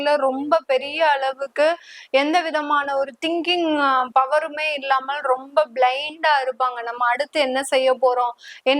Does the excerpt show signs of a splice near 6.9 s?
no; 0 cuts

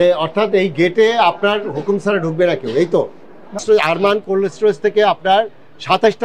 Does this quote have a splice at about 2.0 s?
no; 1 cut; at 3.6 s

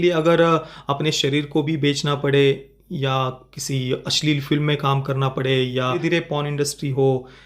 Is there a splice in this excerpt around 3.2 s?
no; 1 cut; at 6.0 s

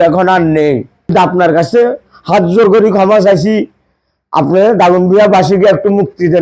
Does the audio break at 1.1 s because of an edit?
yes; 1 cut; at 1.1 s

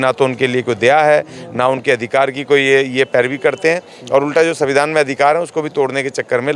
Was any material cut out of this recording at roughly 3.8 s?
no; 0 cuts

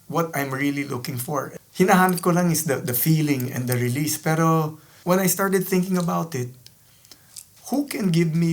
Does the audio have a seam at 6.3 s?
no; 2 cuts; at 1.5 s, 4.9 s

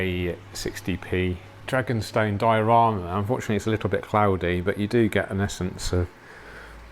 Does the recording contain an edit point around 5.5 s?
no; 1 cut; at 1.5 s

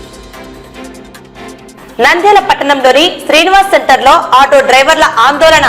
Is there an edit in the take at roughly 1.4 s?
yes; 1 cut; at 1.4 s

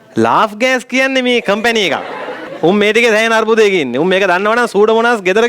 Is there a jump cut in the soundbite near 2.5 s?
yes; 1 cut; at 2.5 s

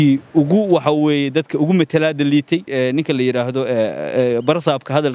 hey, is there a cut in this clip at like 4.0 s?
no; 1 cut; at 2.7 s

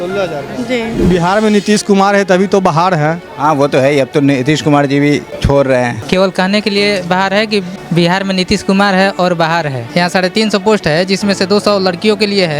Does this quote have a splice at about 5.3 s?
yes; 5 cuts; at 1.0 s, 5.3 s, 6.0 s, 7.8 s, 9.8 s

